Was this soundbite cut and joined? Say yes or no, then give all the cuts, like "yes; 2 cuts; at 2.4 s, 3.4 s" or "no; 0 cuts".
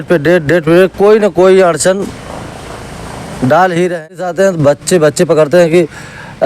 yes; 1 cut; at 4.1 s